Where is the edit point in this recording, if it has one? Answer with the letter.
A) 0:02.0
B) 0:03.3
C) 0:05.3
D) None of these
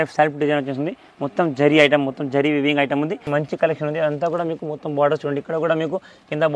B